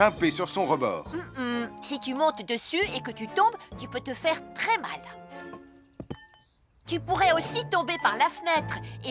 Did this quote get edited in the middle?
no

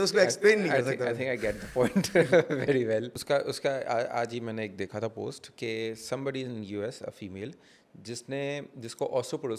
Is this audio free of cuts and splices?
no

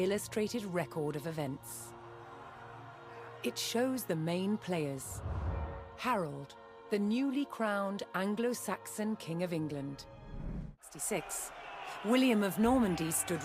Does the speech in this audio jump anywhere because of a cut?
yes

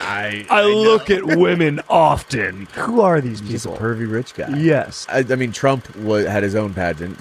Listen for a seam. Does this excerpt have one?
yes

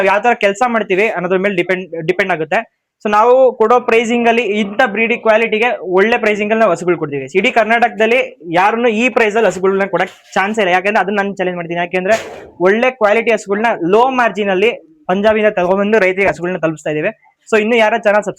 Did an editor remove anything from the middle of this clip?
no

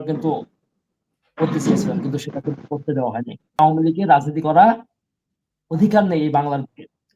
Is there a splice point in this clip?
yes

